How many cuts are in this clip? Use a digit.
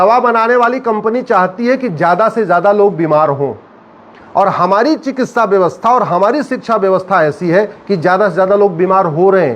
0